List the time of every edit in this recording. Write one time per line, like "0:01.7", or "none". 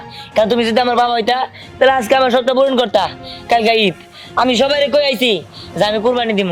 none